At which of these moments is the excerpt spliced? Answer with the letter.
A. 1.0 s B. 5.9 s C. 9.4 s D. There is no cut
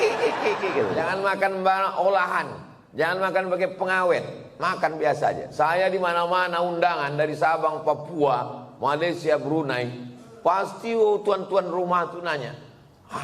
A